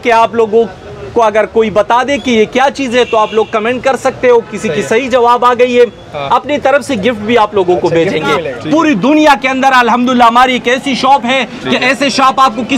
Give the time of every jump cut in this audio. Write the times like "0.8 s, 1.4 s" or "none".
8.5 s